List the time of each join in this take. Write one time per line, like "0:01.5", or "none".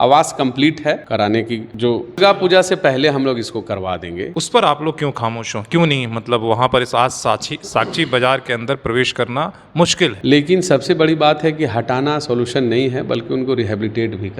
0:01.0
0:02.2
0:04.3
0:10.2

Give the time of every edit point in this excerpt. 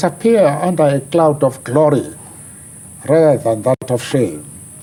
none

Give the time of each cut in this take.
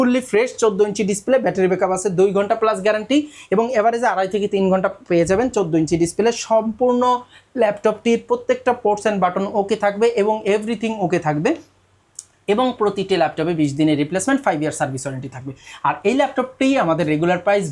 none

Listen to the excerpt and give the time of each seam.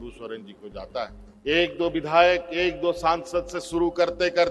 0:01.3

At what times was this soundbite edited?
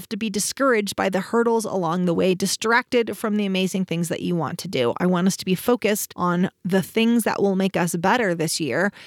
none

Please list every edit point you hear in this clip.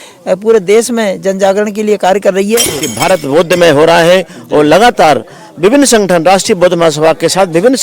0:02.8

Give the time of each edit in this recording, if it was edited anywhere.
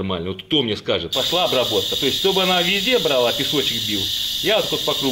0:01.1

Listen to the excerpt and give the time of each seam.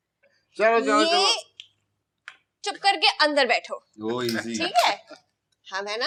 none

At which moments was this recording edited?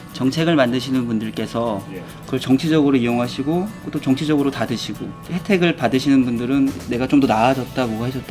0:05.1
0:06.8

